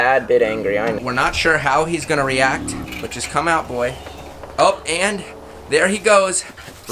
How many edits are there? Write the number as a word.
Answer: two